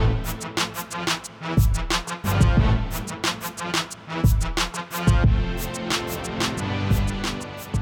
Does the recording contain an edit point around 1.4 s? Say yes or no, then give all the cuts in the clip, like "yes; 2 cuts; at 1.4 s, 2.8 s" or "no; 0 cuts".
no; 2 cuts; at 4.4 s, 6.5 s